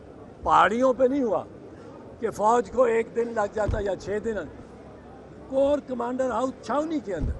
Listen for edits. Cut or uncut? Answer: uncut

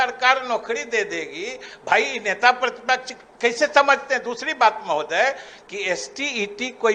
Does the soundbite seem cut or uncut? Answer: uncut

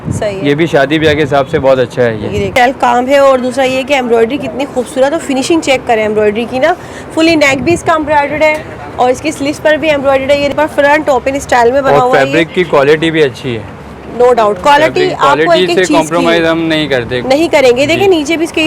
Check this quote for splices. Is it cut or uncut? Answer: cut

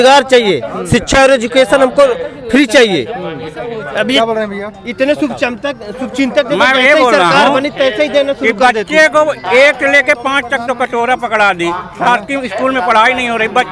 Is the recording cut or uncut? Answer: uncut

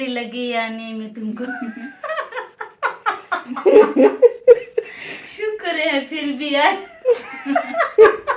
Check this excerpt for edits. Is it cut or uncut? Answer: uncut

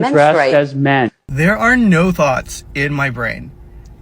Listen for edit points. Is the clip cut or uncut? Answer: cut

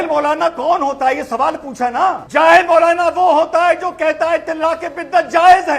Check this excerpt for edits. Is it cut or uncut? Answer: cut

